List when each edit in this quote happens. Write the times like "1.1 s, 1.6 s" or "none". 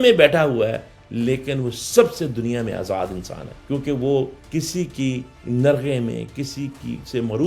none